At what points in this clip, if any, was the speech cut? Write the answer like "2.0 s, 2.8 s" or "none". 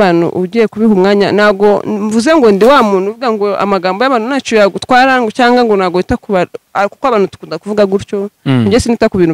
none